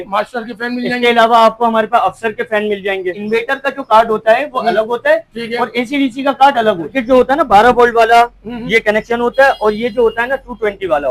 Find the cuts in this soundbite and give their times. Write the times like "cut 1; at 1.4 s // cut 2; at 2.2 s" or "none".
cut 1; at 3.2 s // cut 2; at 6.9 s